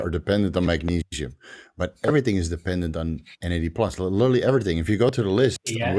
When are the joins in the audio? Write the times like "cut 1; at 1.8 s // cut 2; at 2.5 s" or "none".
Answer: none

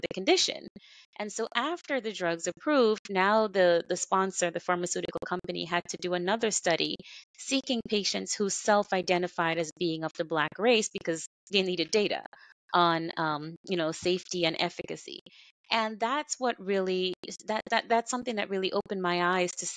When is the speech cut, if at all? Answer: none

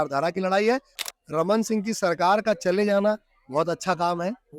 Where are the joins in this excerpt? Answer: cut 1; at 1.0 s

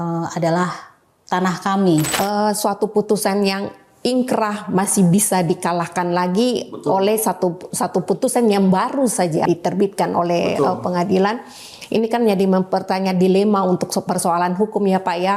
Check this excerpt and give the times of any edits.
cut 1; at 2.1 s // cut 2; at 9.5 s

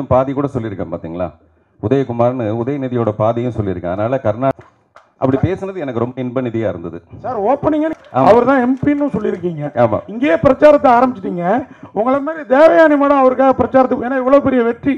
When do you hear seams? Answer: cut 1; at 4.5 s // cut 2; at 7.9 s

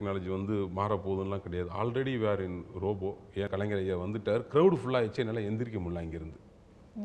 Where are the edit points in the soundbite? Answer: cut 1; at 3.5 s

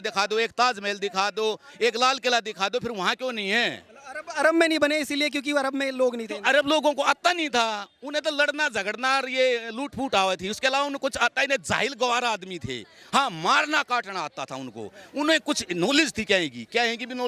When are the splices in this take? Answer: none

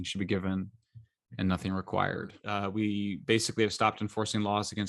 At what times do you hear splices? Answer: cut 1; at 2.4 s

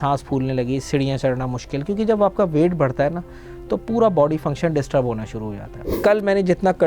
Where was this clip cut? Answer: cut 1; at 5.8 s

